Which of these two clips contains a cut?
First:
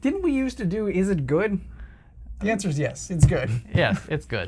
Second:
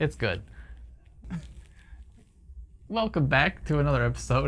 second; 1 cut; at 1.3 s

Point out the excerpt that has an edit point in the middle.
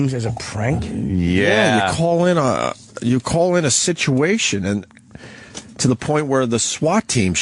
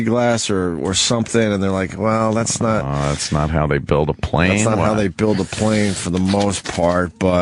first; 1 cut; at 4.9 s

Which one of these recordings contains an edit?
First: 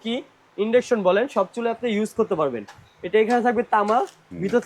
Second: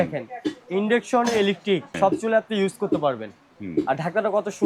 second; 1 cut; at 1.9 s

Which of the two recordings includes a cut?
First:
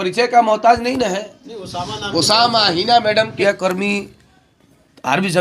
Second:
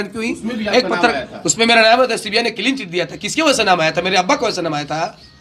first; 1 cut; at 3.3 s

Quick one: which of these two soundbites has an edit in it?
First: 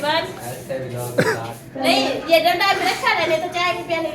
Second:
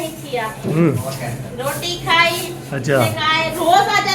first; 1 cut; at 1.6 s

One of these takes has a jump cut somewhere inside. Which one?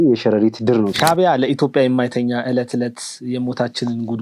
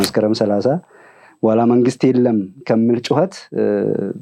first; 1 cut; at 0.9 s

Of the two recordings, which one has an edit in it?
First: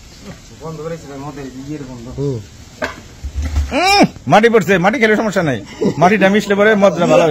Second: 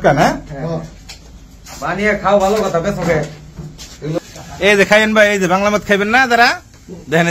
second; 1 cut; at 4.2 s

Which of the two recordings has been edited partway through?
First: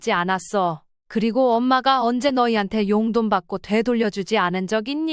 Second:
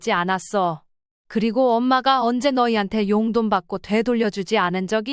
first; 1 cut; at 1.3 s

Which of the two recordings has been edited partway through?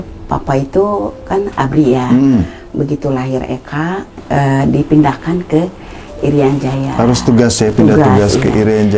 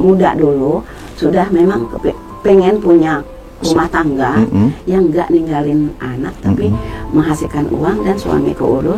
first; 1 cut; at 4.1 s

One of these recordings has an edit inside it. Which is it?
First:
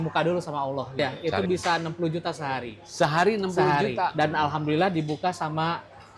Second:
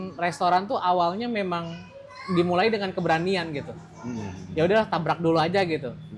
first; 2 cuts; at 1.0 s, 4.1 s

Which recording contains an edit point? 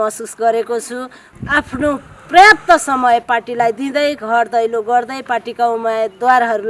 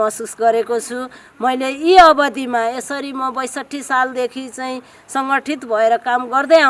first; 1 cut; at 1.3 s

